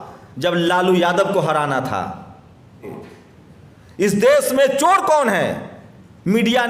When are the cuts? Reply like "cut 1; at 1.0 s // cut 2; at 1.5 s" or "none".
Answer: cut 1; at 2.9 s